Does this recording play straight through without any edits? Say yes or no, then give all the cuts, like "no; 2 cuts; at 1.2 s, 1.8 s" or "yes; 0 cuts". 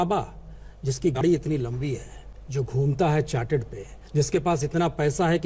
no; 2 cuts; at 1.2 s, 4.0 s